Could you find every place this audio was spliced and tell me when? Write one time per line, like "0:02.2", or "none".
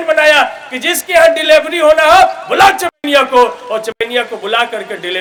none